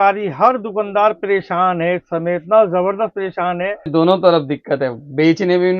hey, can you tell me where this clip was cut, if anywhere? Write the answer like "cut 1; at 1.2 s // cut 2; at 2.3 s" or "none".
cut 1; at 3.9 s

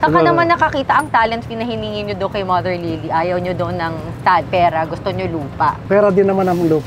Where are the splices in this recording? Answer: cut 1; at 5.8 s

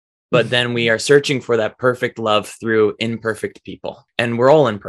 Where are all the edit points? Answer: cut 1; at 4.0 s

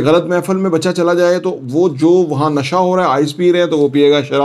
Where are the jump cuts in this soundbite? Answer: none

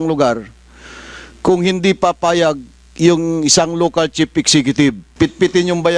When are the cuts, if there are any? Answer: cut 1; at 5.0 s

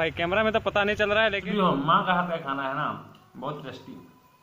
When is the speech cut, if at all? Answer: cut 1; at 1.4 s

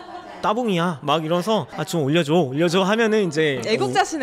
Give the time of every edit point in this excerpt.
cut 1; at 1.8 s

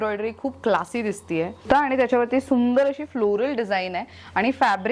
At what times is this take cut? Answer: cut 1; at 1.6 s

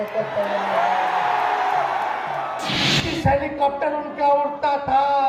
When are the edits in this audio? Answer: cut 1; at 2.8 s

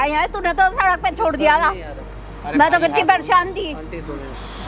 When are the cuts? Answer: none

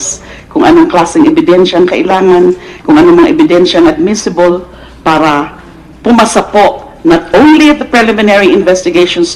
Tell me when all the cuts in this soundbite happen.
cut 1; at 5.3 s

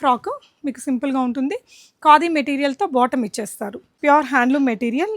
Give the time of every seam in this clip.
cut 1; at 3.8 s

